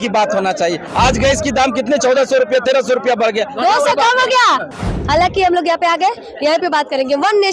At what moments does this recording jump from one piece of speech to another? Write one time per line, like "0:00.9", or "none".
0:00.8
0:04.7